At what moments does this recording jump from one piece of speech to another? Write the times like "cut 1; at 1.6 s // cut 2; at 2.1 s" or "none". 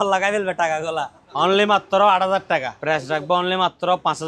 cut 1; at 1.2 s // cut 2; at 2.7 s